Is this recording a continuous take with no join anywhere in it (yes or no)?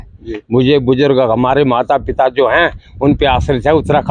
yes